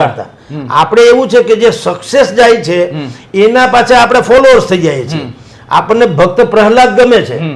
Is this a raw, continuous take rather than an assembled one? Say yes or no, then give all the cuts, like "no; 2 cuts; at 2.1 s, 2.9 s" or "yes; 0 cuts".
yes; 0 cuts